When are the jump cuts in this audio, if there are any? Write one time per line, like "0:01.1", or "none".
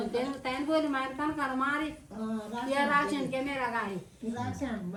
none